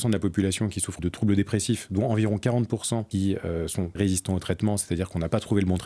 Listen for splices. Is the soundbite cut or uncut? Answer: cut